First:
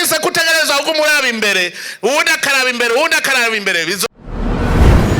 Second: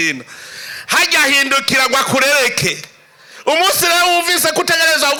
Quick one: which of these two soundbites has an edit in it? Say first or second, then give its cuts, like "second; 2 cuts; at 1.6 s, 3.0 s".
first; 1 cut; at 4.0 s